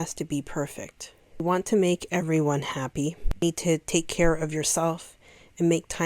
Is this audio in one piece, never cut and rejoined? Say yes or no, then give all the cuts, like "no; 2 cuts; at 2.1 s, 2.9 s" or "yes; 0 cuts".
no; 2 cuts; at 1.4 s, 3.2 s